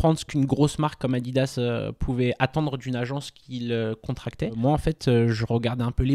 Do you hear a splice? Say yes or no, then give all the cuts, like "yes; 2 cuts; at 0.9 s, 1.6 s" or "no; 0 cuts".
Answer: yes; 1 cut; at 4.6 s